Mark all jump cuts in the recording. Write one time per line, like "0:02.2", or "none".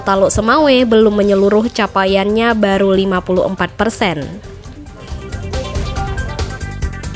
0:04.5